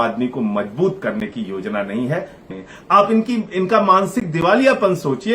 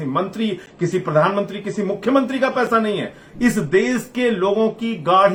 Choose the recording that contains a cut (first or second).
first